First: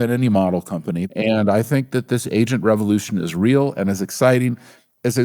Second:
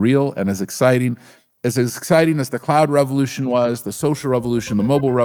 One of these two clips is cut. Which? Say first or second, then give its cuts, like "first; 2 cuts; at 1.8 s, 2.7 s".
first; 1 cut; at 1.1 s